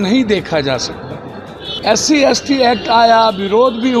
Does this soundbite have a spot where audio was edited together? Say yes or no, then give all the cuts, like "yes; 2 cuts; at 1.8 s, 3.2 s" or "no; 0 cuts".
yes; 1 cut; at 1.6 s